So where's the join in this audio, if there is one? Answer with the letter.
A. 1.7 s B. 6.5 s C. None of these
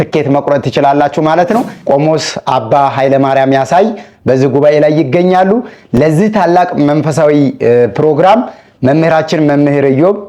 A